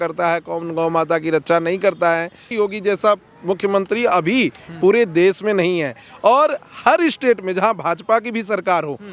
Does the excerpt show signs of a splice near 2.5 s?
yes; 1 cut; at 2.5 s

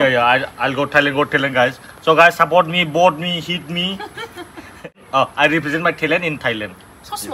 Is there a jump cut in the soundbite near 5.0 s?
yes; 1 cut; at 5.0 s

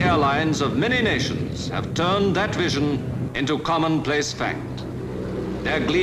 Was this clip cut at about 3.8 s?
no; 1 cut; at 1.9 s

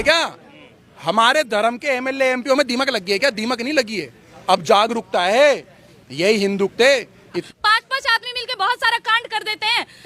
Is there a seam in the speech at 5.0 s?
no; 1 cut; at 7.5 s

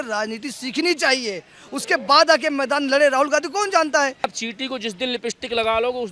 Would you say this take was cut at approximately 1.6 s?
no; 1 cut; at 4.3 s

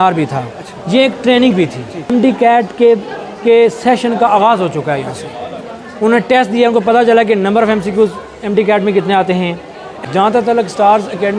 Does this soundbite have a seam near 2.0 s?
yes; 2 cuts; at 2.0 s, 9.9 s

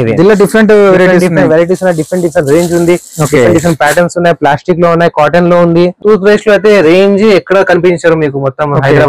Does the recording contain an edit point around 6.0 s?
yes; 1 cut; at 6.0 s

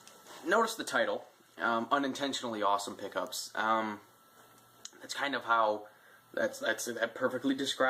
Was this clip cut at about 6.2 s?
yes; 1 cut; at 6.2 s

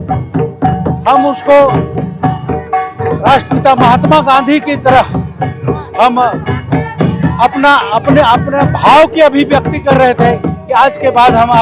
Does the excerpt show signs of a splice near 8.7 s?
no; 0 cuts

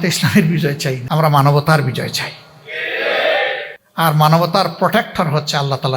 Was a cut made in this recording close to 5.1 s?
no; 2 cuts; at 1.0 s, 3.8 s

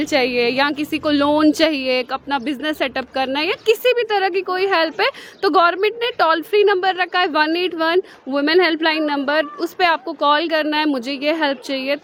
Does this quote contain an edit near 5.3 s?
no; 0 cuts

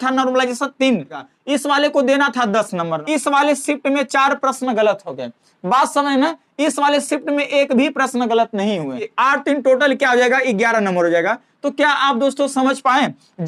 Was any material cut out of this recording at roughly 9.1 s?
yes; 3 cuts; at 1.3 s, 3.0 s, 9.1 s

